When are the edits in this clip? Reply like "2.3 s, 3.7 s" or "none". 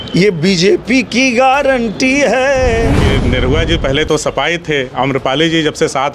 3.0 s